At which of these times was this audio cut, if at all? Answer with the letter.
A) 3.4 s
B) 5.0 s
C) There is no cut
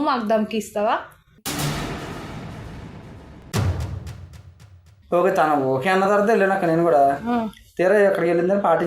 B